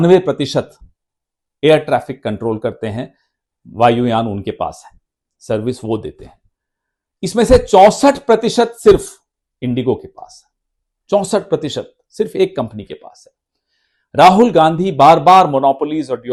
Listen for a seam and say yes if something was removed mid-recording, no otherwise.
no